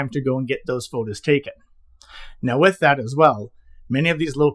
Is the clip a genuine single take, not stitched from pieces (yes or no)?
yes